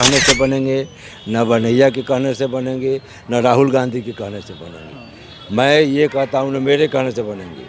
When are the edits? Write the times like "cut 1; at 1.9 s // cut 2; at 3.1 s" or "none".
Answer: none